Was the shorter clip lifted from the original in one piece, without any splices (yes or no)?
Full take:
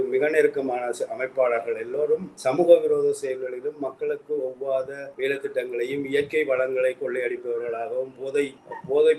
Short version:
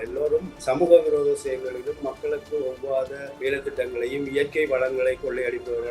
yes